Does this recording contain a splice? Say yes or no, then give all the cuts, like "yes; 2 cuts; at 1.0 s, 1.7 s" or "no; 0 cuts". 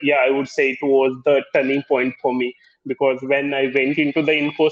no; 0 cuts